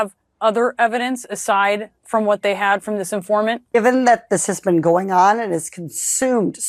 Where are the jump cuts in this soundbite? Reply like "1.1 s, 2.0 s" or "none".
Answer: 3.7 s